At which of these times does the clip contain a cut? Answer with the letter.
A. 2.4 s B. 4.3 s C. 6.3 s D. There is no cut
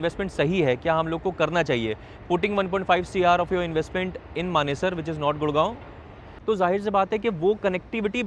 C